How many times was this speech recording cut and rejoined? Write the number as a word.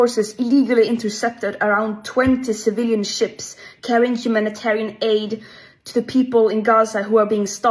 zero